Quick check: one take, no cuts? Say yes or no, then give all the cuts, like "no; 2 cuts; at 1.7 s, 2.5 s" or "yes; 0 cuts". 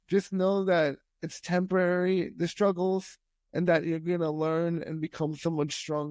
yes; 0 cuts